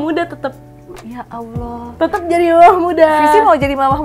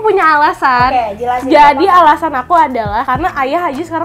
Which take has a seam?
second; 1 cut; at 3.1 s

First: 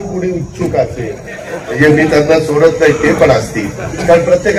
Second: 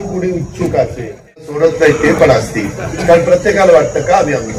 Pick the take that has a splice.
second; 1 cut; at 1.6 s

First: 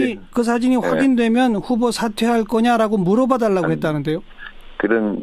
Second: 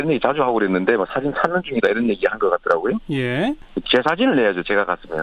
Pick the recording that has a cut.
second; 1 cut; at 2.6 s

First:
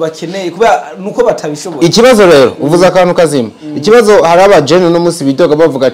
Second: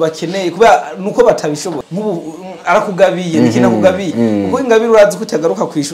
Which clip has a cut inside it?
second; 1 cut; at 1.7 s

